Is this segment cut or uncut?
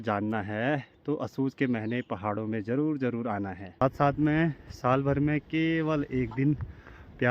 cut